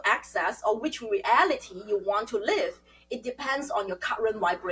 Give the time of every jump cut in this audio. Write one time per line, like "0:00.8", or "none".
none